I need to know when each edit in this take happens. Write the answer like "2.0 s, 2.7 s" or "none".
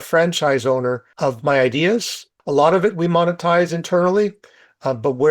1.1 s, 2.3 s